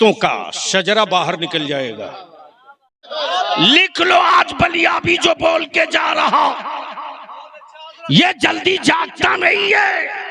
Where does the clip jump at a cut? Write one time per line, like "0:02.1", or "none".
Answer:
0:03.1

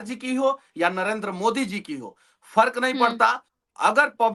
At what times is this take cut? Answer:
none

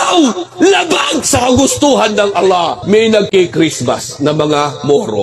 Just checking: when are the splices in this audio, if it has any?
0:02.8

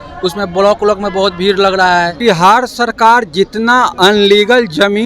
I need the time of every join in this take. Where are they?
0:02.2

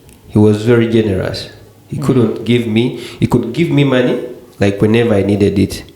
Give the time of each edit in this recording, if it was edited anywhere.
none

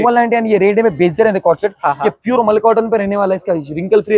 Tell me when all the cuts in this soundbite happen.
none

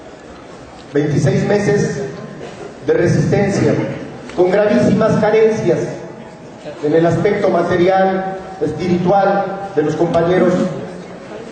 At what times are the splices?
0:08.1

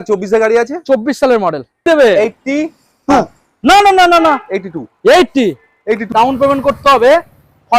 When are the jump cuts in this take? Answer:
0:01.9
0:06.0

